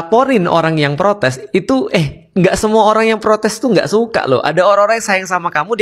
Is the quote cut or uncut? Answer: uncut